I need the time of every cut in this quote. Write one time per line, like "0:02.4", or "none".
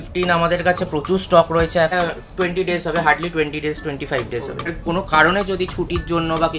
0:01.9
0:04.7